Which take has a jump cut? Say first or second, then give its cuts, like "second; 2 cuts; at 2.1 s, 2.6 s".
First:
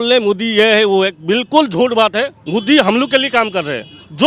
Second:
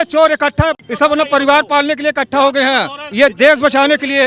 second; 2 cuts; at 0.8 s, 3.0 s